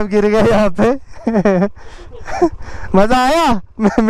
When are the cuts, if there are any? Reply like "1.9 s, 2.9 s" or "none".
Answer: none